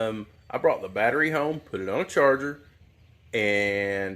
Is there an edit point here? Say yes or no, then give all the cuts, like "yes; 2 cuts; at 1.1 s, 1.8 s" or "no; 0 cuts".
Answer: no; 0 cuts